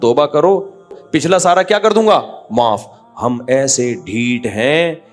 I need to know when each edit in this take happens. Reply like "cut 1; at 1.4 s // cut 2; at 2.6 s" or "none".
cut 1; at 1.0 s